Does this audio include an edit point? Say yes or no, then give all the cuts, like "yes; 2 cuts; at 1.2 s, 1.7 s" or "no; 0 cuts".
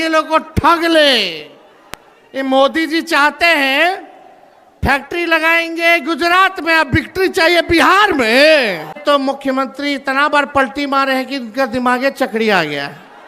yes; 1 cut; at 9.0 s